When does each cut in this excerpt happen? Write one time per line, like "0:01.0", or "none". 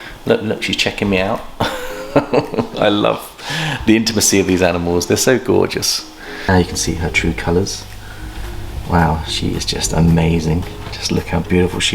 0:06.5